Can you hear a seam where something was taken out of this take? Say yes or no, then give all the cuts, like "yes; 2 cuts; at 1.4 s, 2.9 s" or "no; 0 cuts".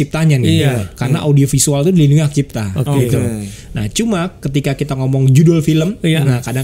yes; 1 cut; at 3.6 s